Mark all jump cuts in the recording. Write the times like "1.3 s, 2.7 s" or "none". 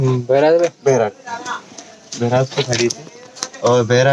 none